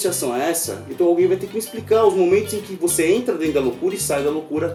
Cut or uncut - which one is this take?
uncut